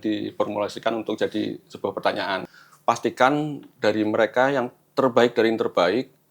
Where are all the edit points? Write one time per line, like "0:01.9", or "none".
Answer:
0:02.4